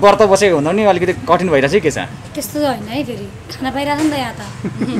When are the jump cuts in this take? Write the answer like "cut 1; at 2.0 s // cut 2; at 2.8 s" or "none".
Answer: none